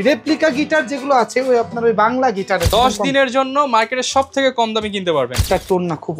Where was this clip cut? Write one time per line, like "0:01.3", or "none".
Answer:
0:02.7
0:05.4